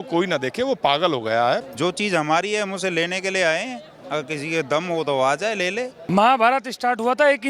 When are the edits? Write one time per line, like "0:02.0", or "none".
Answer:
0:01.6
0:06.1